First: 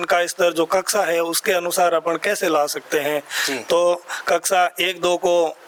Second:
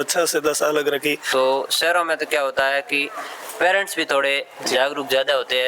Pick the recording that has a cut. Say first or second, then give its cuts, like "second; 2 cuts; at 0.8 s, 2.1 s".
second; 1 cut; at 1.2 s